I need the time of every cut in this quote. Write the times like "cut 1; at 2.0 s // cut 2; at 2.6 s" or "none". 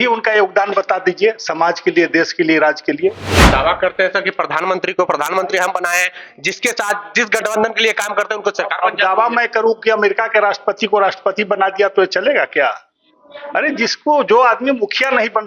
none